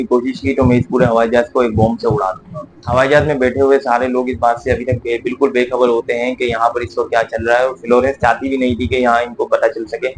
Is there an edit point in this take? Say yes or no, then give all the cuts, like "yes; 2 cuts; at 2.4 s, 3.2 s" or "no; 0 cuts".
no; 0 cuts